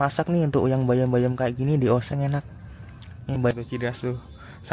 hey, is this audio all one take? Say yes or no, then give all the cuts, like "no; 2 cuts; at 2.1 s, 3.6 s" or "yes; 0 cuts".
no; 1 cut; at 3.5 s